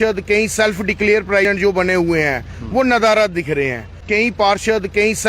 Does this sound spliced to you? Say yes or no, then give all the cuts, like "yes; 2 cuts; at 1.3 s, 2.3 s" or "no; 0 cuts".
yes; 2 cuts; at 1.4 s, 3.9 s